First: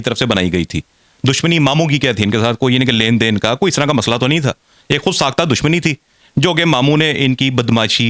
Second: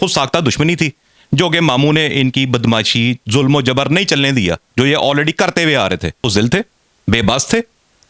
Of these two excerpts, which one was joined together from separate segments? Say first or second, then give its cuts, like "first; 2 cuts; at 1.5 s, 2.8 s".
second; 1 cut; at 6.3 s